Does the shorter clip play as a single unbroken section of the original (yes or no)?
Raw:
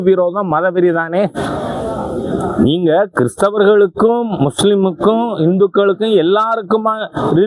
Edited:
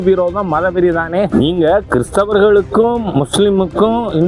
no